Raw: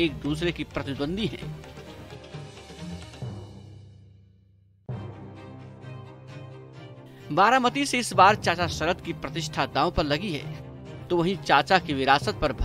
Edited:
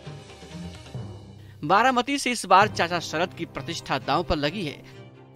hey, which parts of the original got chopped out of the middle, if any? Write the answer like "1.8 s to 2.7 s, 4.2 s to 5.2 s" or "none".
3.8 s to 7.2 s